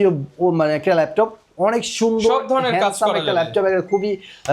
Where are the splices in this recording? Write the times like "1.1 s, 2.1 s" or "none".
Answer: none